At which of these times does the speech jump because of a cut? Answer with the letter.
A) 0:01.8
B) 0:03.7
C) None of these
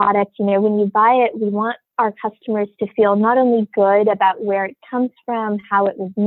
A